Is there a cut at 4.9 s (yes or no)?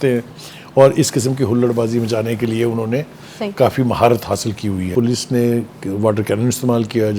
yes